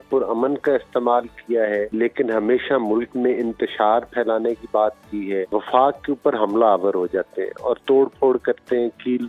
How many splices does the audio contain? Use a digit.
2